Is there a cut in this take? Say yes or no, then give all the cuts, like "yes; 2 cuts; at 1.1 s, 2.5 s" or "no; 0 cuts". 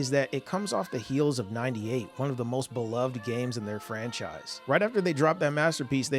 yes; 1 cut; at 4.5 s